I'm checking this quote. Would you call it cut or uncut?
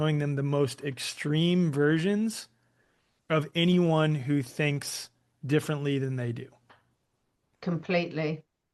uncut